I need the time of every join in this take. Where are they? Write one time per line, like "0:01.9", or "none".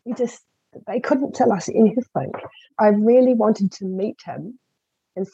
0:02.7